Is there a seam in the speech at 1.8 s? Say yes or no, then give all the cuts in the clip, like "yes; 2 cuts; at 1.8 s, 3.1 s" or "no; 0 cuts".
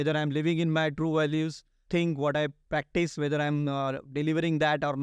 yes; 2 cuts; at 1.8 s, 2.6 s